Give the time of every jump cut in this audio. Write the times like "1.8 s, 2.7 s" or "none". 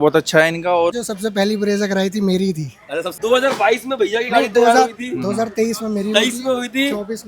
0.9 s, 3.1 s